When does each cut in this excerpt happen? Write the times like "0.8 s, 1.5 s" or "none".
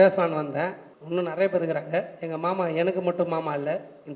none